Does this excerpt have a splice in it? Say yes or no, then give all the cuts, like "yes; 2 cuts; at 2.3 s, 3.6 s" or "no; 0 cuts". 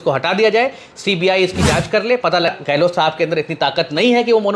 yes; 1 cut; at 2.5 s